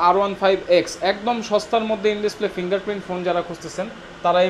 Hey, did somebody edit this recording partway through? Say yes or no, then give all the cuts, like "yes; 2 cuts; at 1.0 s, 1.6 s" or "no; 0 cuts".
no; 0 cuts